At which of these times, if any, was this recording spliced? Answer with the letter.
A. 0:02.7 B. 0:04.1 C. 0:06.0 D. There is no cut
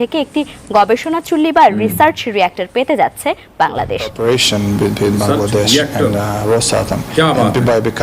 B